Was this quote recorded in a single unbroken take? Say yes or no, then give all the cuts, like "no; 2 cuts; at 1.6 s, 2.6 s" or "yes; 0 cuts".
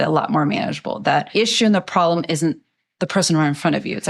no; 1 cut; at 1.3 s